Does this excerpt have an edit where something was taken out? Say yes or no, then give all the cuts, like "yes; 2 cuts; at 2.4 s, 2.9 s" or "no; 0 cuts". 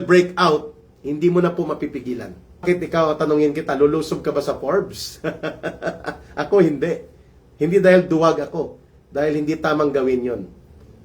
yes; 1 cut; at 2.6 s